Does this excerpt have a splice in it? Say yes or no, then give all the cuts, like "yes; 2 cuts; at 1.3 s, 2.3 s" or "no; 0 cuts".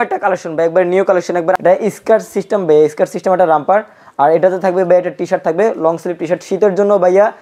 yes; 1 cut; at 1.6 s